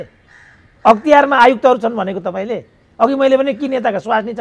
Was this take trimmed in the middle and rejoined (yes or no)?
no